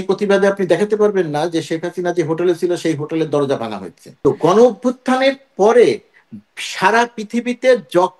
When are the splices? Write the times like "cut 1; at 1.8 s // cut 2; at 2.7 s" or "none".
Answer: cut 1; at 4.2 s